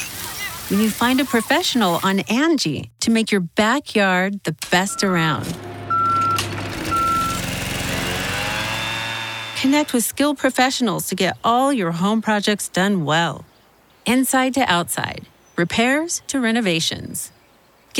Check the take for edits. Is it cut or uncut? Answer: uncut